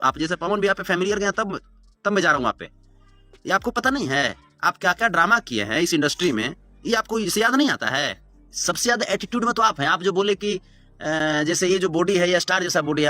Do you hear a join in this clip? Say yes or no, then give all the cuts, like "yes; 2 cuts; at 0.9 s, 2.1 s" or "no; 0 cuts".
yes; 1 cut; at 8.2 s